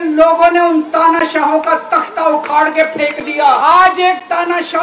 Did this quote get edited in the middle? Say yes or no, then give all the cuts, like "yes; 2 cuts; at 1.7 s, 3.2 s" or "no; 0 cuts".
yes; 1 cut; at 3.6 s